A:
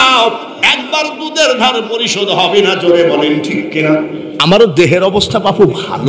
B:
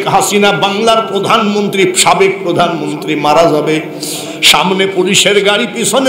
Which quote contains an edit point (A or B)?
A